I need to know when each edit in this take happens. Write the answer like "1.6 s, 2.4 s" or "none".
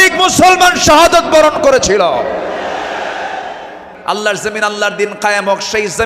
3.9 s